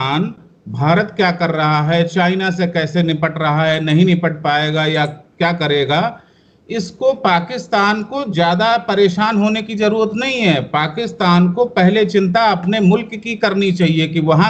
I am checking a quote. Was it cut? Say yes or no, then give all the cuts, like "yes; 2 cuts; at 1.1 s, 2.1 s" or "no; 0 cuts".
no; 0 cuts